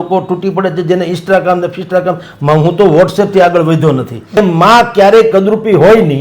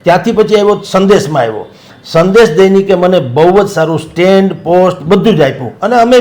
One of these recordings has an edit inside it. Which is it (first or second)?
first